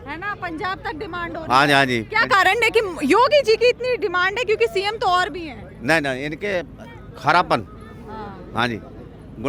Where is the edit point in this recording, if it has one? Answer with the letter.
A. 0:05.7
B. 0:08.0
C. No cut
C